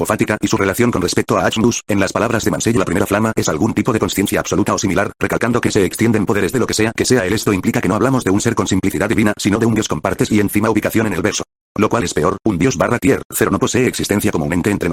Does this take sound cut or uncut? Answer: uncut